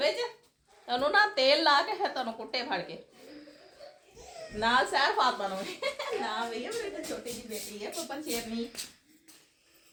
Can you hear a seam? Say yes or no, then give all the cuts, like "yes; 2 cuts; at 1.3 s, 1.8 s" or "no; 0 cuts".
no; 0 cuts